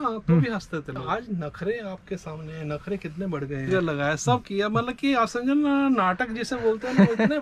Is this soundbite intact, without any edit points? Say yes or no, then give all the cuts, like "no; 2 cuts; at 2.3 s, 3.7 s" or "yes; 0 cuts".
no; 2 cuts; at 1.1 s, 3.7 s